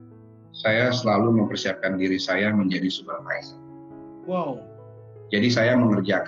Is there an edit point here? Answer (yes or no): no